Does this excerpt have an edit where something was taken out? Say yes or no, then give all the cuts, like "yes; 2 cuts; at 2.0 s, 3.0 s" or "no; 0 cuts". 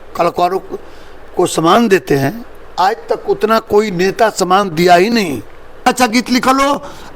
yes; 1 cut; at 5.9 s